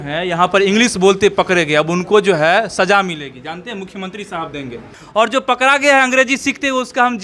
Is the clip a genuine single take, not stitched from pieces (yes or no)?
no